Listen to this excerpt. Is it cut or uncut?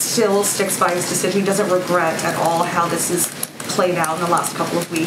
uncut